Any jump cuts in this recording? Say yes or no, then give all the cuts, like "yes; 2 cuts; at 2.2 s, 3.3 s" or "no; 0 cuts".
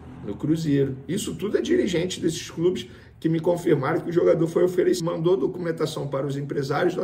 yes; 1 cut; at 5.0 s